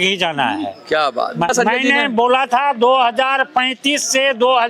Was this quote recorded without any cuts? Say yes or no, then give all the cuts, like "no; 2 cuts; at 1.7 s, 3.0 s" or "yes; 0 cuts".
no; 1 cut; at 1.5 s